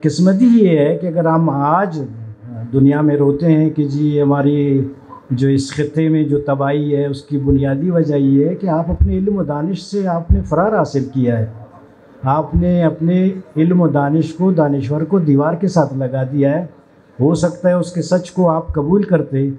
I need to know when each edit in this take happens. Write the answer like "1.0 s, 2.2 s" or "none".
none